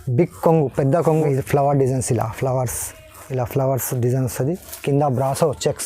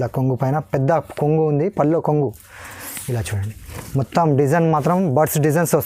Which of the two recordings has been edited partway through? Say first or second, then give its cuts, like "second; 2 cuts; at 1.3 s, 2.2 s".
first; 1 cut; at 1.2 s